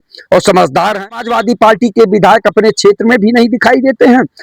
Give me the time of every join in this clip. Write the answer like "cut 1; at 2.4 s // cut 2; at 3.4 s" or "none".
cut 1; at 1.3 s